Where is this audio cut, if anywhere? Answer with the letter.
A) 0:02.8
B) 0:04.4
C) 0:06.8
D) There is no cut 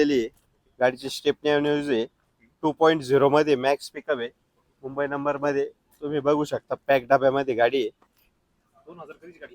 D